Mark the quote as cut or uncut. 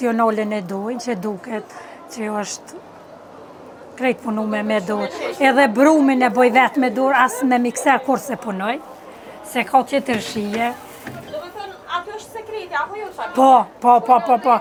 uncut